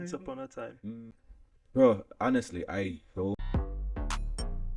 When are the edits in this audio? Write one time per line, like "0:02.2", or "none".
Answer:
0:01.1
0:03.4